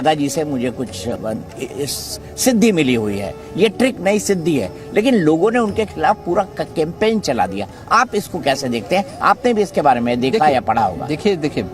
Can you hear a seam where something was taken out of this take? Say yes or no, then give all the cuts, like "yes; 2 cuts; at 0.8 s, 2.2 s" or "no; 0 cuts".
yes; 1 cut; at 1.1 s